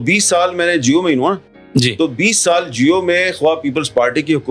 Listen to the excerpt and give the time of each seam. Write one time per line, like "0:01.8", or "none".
none